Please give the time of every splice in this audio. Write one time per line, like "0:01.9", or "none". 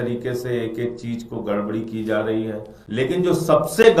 0:02.7